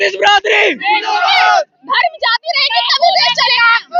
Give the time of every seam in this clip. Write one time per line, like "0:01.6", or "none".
none